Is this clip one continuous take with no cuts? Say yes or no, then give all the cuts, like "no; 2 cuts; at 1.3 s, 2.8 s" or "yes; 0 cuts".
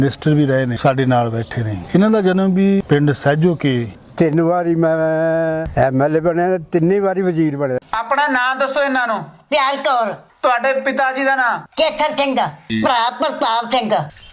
no; 1 cut; at 4.0 s